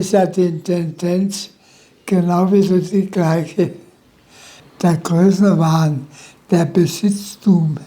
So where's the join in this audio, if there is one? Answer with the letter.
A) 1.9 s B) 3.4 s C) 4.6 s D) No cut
C